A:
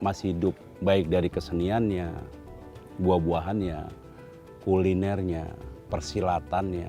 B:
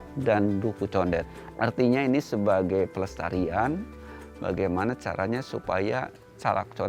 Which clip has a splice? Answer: B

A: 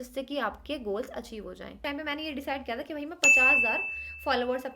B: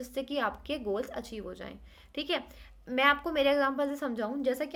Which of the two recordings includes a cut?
A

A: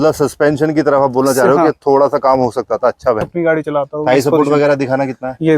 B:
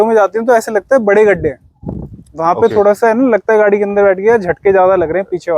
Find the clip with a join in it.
A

